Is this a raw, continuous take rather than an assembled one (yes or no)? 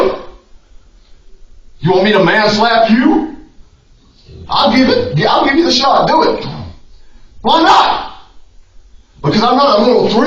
yes